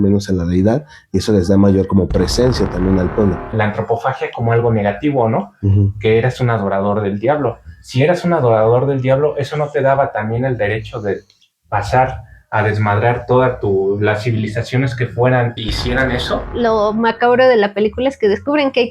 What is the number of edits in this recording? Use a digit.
2